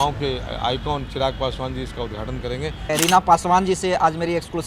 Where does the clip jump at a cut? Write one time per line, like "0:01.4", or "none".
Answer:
0:02.9